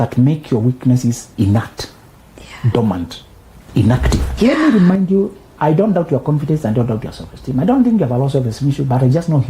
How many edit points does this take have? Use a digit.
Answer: 2